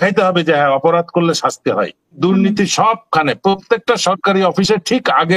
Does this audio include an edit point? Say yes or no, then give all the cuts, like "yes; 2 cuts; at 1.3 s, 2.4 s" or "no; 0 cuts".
yes; 1 cut; at 2.2 s